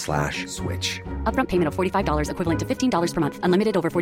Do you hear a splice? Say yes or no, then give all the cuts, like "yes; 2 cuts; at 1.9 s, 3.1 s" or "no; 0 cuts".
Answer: no; 0 cuts